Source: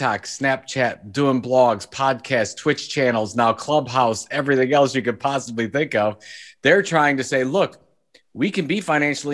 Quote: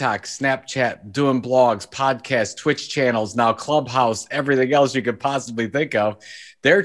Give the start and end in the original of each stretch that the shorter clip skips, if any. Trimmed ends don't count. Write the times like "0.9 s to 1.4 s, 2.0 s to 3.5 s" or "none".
none